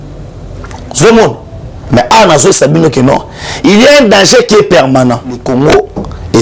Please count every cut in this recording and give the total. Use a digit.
1